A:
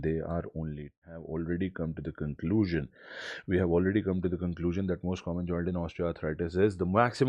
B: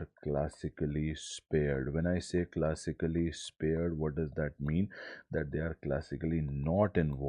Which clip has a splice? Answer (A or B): A